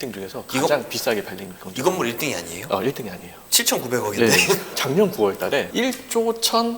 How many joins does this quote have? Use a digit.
1